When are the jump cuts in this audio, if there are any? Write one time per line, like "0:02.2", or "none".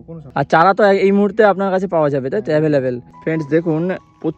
0:03.1